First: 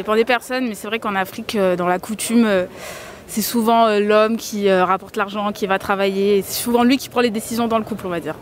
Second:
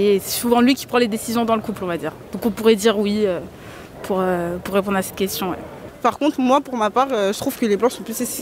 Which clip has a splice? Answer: second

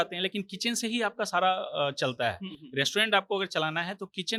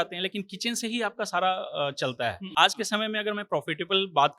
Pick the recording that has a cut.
second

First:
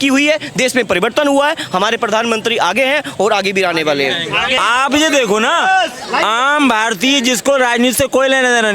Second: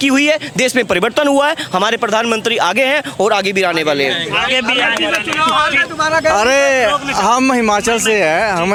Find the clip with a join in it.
first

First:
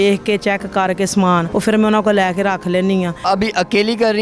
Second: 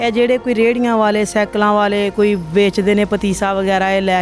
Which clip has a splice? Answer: first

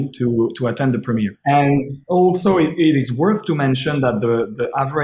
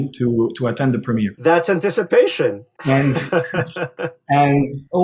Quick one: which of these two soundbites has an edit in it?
first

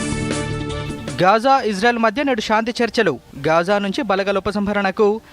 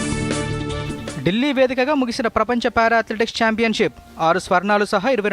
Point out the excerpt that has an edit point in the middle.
second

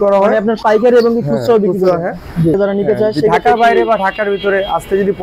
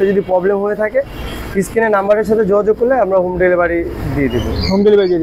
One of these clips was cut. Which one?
first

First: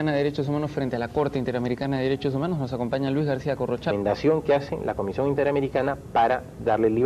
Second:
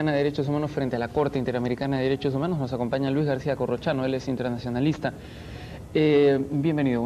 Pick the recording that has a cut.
second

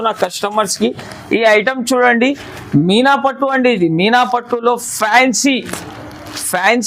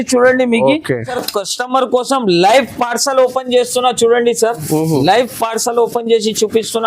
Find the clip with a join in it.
second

